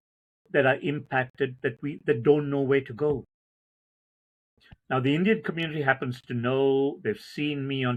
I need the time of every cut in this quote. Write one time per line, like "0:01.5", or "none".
none